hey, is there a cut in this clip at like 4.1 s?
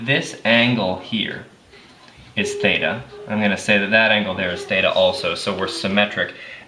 no; 0 cuts

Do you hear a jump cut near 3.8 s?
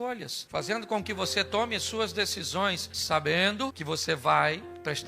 yes; 2 cuts; at 2.9 s, 3.8 s

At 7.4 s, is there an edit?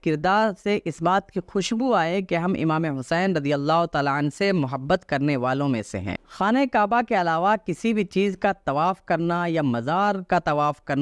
no; 1 cut; at 6.1 s

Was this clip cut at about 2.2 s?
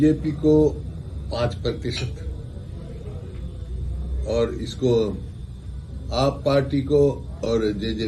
no; 0 cuts

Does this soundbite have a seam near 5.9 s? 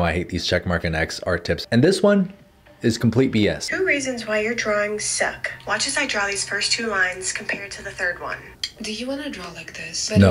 no; 3 cuts; at 1.6 s, 3.7 s, 8.6 s

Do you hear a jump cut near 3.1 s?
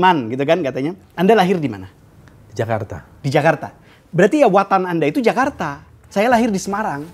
no; 1 cut; at 1.0 s

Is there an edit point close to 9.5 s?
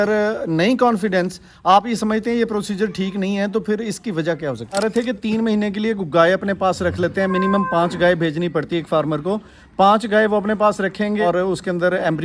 no; 2 cuts; at 4.8 s, 11.2 s

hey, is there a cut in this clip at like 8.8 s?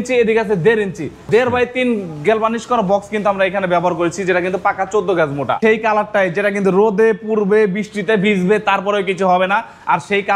no; 2 cuts; at 1.2 s, 5.6 s

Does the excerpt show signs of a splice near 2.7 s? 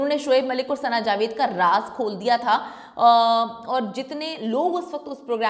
no; 0 cuts

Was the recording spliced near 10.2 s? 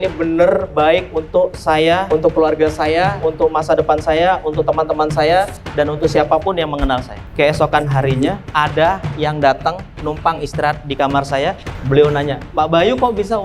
no; 2 cuts; at 7.2 s, 11.7 s

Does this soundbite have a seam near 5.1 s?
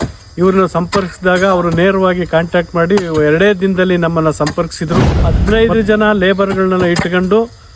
yes; 1 cut; at 5.1 s

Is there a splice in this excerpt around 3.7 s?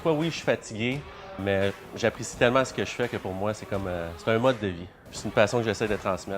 no; 2 cuts; at 1.4 s, 5.1 s

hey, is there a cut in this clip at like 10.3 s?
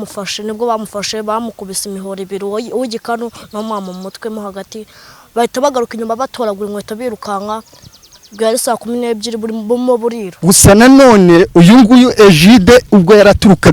yes; 1 cut; at 10.3 s

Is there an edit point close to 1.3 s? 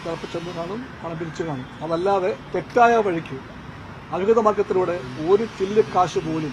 no; 0 cuts

